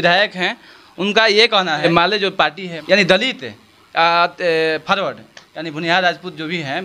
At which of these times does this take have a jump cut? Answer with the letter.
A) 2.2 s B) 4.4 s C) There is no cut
A